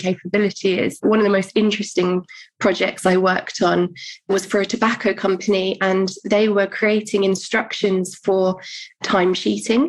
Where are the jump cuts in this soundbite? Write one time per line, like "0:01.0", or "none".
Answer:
0:01.0
0:04.3
0:09.0